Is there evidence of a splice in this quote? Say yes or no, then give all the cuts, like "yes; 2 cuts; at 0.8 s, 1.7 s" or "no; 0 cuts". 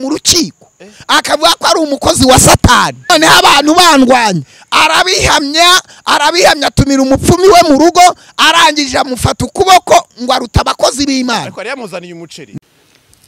yes; 2 cuts; at 3.1 s, 12.6 s